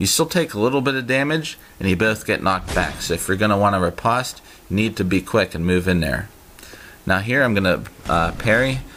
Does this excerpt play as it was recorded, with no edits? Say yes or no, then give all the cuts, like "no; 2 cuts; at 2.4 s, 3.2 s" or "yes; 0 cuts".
no; 1 cut; at 5.7 s